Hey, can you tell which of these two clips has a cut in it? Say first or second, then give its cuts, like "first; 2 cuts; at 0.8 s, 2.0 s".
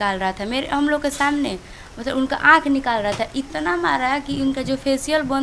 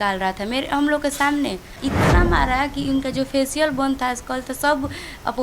second; 1 cut; at 1.8 s